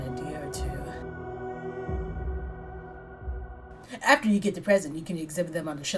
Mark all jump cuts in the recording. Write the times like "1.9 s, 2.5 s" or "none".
none